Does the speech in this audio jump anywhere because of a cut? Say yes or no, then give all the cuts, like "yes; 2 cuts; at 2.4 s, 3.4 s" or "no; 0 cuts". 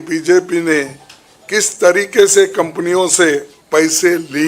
yes; 1 cut; at 3.5 s